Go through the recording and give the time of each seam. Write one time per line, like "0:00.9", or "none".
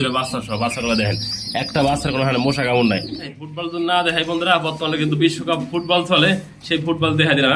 0:03.2